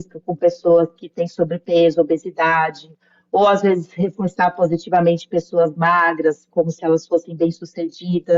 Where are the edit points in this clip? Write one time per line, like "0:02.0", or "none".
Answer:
none